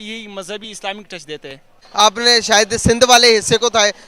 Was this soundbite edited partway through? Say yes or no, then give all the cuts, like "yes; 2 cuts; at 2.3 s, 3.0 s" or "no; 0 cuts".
yes; 1 cut; at 1.8 s